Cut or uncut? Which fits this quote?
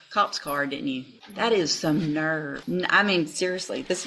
cut